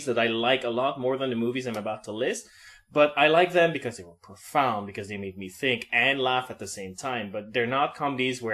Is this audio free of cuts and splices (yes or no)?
no